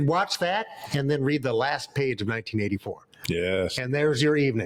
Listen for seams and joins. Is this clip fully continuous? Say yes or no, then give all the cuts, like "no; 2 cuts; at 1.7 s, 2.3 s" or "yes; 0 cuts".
yes; 0 cuts